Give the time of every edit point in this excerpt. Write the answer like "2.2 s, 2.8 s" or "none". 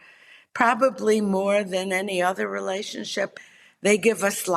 3.3 s